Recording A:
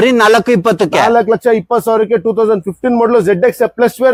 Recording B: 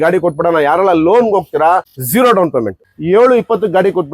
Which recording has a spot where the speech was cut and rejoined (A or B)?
B